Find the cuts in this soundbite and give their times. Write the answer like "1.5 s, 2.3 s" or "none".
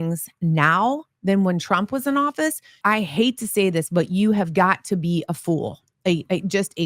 2.7 s